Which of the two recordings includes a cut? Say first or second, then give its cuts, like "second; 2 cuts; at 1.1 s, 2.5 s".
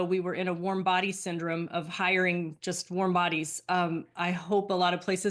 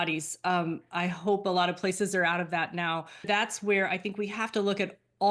second; 1 cut; at 3.3 s